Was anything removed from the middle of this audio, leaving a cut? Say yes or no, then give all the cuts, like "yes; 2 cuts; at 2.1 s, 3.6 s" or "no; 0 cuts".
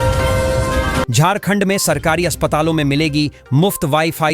yes; 1 cut; at 1.1 s